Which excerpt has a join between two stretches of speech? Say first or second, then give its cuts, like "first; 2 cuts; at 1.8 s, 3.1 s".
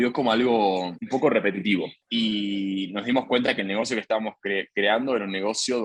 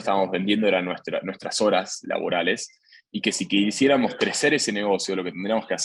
first; 2 cuts; at 1.0 s, 2.0 s